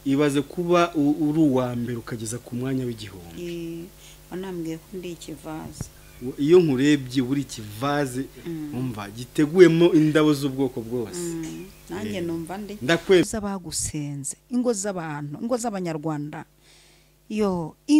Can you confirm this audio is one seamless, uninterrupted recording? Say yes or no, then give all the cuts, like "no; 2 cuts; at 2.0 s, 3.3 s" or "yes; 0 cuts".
yes; 0 cuts